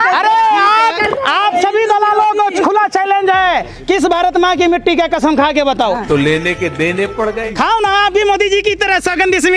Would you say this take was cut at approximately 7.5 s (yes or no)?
yes